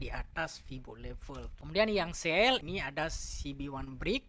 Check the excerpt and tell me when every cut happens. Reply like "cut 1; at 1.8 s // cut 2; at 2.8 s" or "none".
cut 1; at 1.5 s // cut 2; at 2.6 s